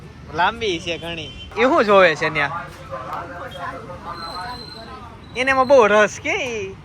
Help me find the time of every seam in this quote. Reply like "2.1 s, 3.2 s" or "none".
1.5 s